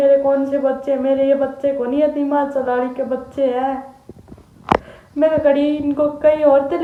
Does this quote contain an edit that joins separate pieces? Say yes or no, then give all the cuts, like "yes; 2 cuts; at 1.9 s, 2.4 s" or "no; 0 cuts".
no; 0 cuts